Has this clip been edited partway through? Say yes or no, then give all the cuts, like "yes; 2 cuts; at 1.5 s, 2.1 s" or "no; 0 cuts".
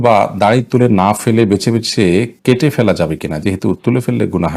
no; 0 cuts